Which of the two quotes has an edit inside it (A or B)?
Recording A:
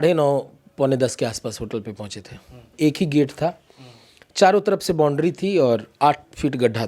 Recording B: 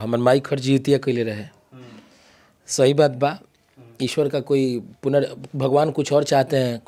A